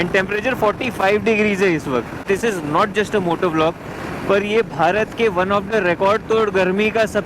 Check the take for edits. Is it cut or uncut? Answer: cut